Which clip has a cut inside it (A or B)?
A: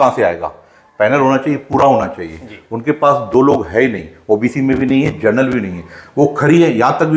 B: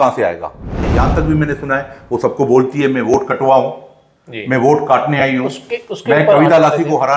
B